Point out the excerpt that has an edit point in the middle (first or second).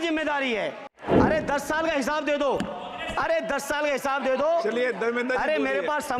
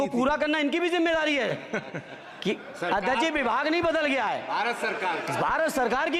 first